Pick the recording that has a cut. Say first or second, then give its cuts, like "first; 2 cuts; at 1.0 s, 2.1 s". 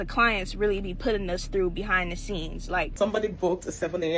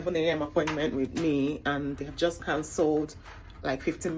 first; 1 cut; at 2.9 s